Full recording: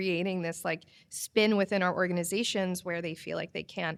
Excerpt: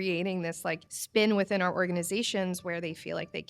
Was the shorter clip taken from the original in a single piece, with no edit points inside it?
no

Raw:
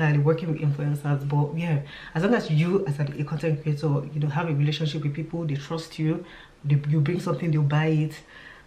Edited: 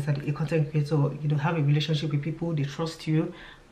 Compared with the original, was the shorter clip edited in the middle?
no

